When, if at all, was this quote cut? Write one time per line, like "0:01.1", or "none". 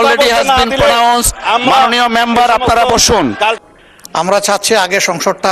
0:03.6